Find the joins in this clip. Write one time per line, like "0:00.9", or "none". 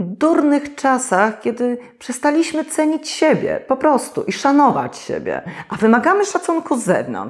none